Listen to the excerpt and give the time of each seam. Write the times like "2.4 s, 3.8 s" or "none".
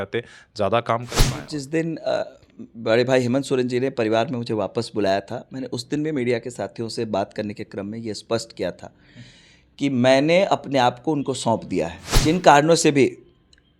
1.4 s, 12.1 s